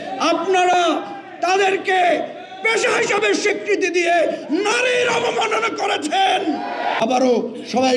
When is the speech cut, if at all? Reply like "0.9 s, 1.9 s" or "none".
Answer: 7.0 s